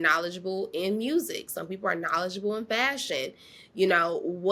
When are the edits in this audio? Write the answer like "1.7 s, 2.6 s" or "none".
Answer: none